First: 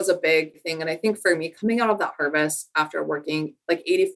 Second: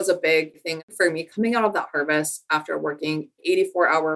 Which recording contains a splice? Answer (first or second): second